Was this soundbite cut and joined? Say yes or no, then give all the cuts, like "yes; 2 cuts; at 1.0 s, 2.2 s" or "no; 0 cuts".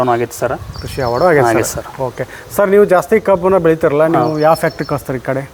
no; 0 cuts